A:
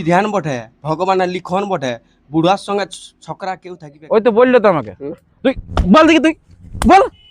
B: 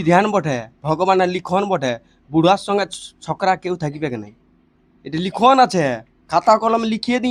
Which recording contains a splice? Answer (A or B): A